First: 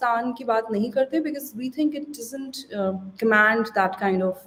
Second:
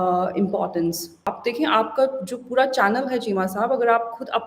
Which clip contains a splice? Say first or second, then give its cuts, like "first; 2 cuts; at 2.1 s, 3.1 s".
second; 1 cut; at 1.2 s